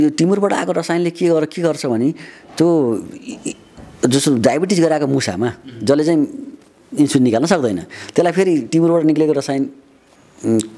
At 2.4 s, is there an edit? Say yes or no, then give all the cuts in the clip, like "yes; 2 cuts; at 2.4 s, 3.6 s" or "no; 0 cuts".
no; 0 cuts